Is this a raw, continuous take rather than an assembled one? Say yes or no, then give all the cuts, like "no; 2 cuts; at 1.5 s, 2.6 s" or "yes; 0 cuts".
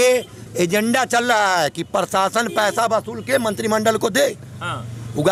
yes; 0 cuts